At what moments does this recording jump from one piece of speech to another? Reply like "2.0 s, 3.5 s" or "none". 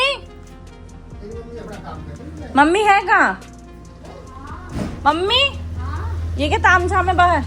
none